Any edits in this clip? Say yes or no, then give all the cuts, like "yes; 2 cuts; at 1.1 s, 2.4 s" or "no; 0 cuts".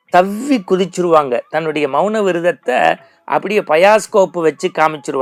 no; 0 cuts